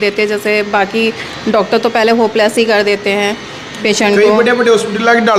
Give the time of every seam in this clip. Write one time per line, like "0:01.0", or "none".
none